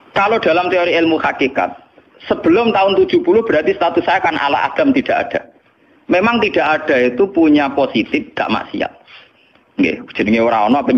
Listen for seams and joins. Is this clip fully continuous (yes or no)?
yes